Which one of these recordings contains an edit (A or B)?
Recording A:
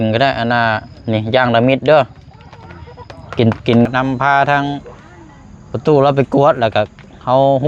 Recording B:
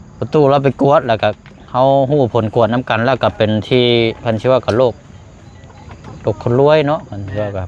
A